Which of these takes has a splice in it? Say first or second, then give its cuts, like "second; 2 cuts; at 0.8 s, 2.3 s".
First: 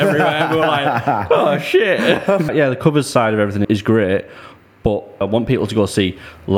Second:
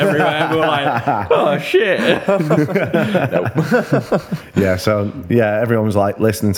first; 3 cuts; at 2.5 s, 3.7 s, 5.2 s